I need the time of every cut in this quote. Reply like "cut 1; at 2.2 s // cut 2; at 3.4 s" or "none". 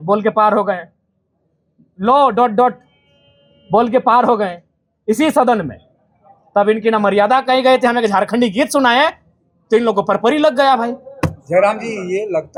none